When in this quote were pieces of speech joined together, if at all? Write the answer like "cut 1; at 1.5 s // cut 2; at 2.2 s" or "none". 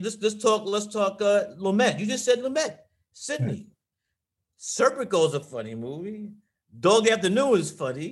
none